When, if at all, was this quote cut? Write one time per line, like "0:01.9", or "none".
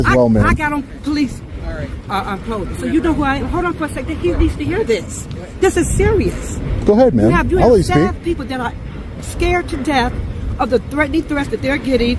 none